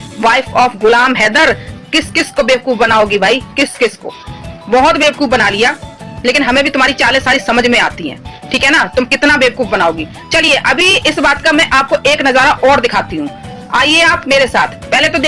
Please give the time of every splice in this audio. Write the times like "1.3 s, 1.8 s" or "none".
none